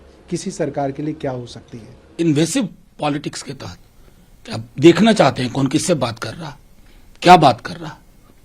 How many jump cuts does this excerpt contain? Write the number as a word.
one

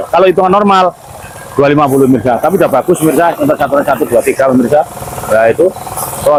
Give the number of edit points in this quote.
zero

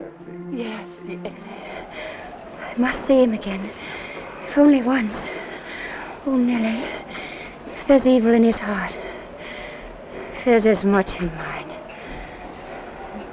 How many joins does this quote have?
one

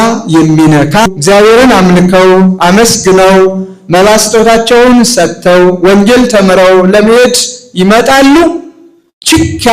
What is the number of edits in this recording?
one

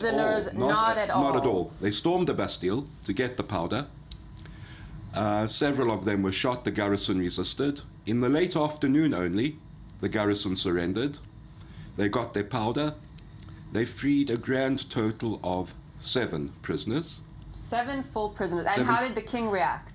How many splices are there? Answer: one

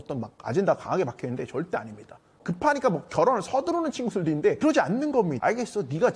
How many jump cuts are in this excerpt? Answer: three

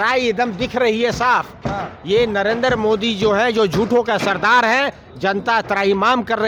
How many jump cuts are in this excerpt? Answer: zero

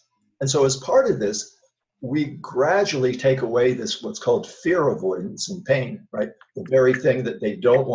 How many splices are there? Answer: zero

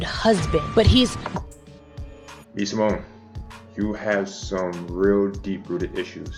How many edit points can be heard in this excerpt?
zero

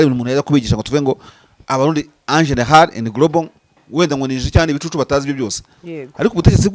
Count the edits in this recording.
zero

